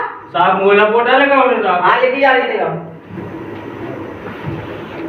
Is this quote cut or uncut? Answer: cut